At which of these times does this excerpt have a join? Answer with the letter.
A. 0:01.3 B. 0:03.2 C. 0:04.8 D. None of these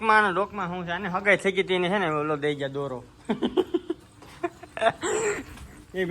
B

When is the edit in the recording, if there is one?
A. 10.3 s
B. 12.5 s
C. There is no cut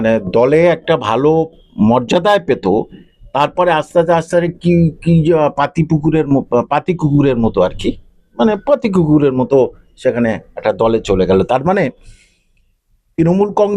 C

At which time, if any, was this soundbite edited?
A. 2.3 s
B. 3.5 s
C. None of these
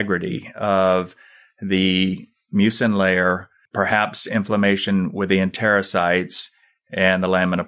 B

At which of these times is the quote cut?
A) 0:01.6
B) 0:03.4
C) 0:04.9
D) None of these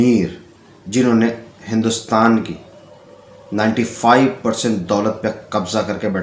D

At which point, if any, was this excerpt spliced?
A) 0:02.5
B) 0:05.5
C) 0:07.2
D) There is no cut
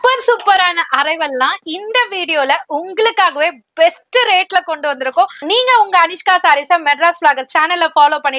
B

